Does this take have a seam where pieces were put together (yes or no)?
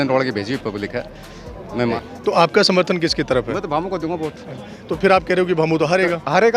yes